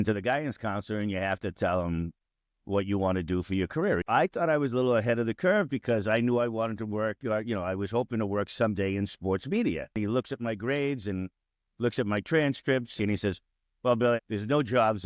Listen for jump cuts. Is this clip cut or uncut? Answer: cut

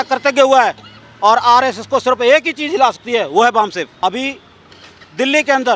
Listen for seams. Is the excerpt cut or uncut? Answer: cut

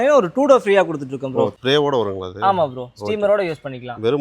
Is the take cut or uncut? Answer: cut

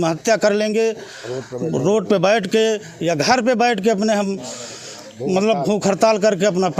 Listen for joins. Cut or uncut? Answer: uncut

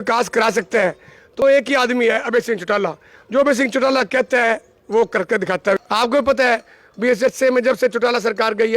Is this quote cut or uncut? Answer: cut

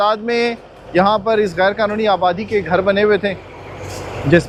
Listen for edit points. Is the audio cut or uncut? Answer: uncut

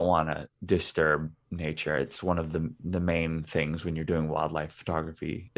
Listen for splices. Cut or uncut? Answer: uncut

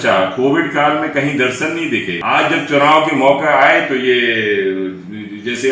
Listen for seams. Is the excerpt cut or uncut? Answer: cut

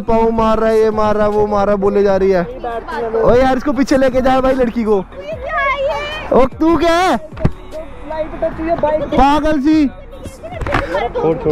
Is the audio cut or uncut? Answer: uncut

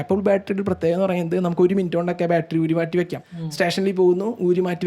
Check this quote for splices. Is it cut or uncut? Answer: uncut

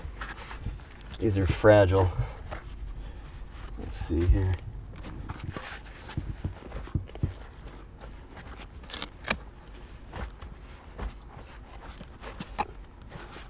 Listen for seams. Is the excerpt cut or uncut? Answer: uncut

